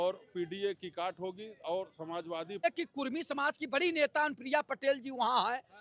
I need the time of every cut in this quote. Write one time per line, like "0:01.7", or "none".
0:02.6